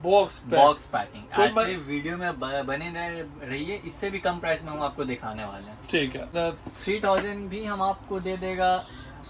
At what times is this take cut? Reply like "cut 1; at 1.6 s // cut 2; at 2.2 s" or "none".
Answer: cut 1; at 6.3 s